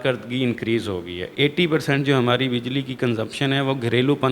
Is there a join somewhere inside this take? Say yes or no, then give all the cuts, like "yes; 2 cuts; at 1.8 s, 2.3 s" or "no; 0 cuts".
yes; 1 cut; at 1.2 s